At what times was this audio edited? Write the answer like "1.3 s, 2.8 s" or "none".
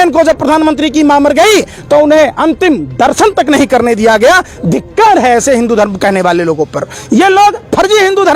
none